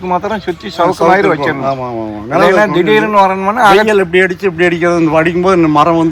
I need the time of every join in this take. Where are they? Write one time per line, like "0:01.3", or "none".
none